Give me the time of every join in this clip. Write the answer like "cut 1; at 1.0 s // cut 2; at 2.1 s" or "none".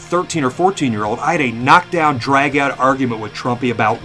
none